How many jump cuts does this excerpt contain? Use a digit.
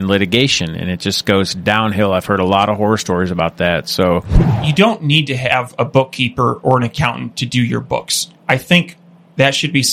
1